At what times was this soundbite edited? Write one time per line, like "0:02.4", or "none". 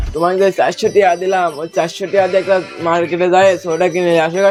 none